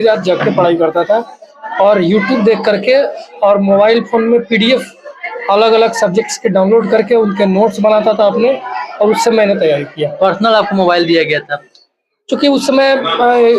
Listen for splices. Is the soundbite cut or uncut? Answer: uncut